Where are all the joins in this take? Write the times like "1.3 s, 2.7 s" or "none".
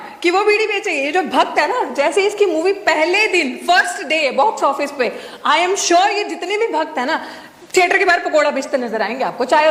none